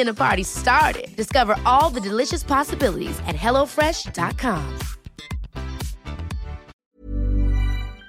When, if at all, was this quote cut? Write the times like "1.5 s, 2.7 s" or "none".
6.8 s

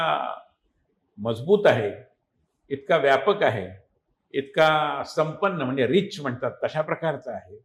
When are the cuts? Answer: none

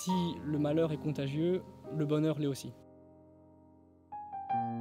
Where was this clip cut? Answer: 2.6 s

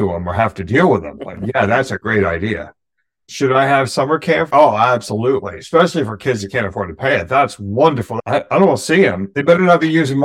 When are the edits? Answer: 8.1 s

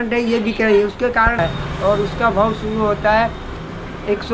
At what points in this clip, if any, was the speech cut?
1.4 s

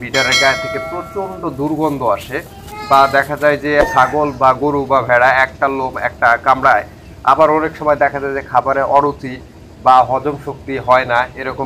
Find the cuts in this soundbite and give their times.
3.8 s

